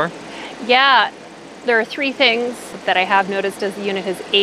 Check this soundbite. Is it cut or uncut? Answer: cut